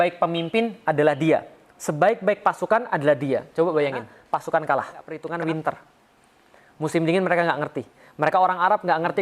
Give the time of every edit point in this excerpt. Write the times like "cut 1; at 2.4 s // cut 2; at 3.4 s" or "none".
cut 1; at 4.1 s // cut 2; at 5.2 s